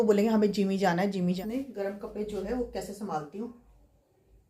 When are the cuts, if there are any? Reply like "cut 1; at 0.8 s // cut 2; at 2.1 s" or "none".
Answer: cut 1; at 1.4 s